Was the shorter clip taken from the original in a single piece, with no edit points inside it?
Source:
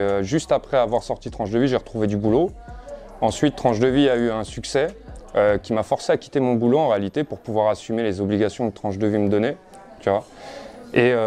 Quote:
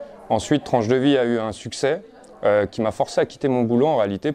yes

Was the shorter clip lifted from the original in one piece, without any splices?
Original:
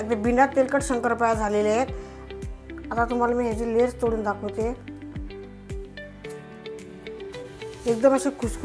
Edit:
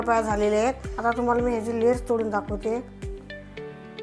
no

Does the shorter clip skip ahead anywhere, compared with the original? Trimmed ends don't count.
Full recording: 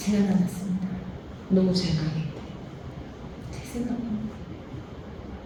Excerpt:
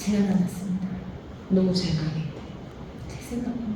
yes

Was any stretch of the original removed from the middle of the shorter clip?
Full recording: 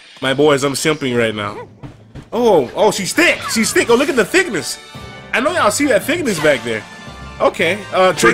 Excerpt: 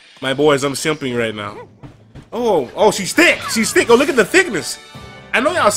no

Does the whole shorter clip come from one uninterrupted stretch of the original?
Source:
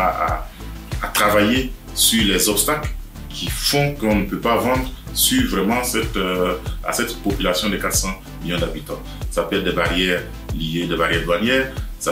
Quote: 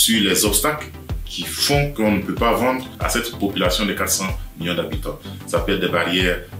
no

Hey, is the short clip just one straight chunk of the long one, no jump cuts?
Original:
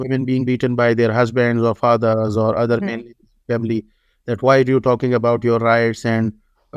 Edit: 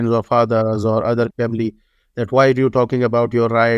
no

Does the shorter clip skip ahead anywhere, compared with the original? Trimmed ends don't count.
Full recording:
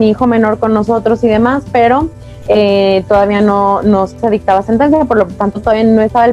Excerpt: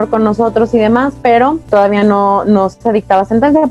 yes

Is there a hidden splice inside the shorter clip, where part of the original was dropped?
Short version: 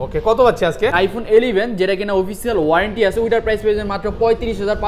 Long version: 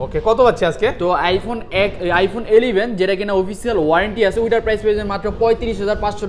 yes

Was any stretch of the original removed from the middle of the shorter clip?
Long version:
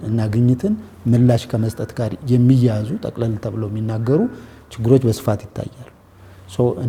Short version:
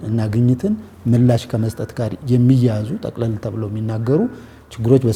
no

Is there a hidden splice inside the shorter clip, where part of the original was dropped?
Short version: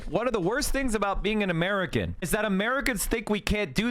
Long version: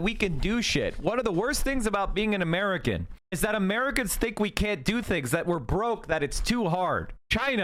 yes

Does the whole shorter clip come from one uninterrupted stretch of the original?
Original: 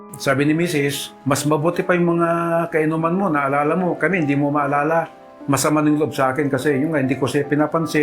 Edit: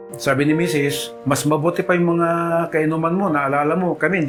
yes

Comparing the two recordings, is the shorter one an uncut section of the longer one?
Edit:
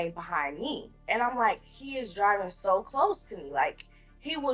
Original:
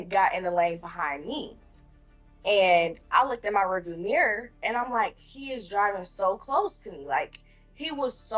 no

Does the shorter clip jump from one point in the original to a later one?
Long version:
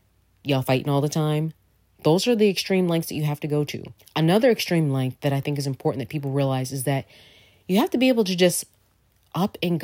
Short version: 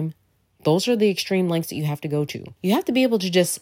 yes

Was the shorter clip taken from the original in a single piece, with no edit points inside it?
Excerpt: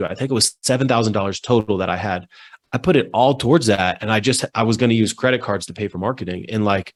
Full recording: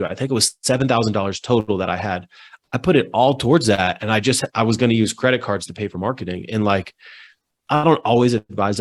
yes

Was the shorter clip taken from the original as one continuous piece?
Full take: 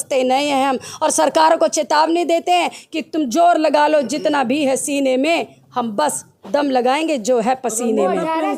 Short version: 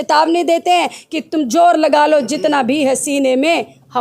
yes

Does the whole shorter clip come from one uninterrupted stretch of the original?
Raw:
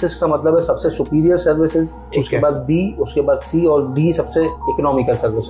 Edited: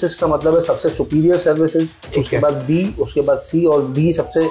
yes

